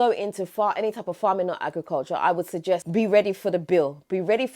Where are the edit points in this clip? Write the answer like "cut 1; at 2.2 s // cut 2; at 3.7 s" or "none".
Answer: cut 1; at 2.8 s